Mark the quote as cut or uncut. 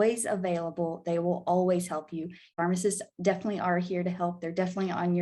cut